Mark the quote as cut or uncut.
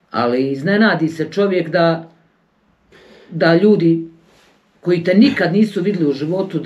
uncut